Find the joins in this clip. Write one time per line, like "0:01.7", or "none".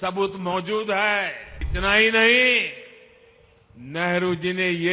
0:01.7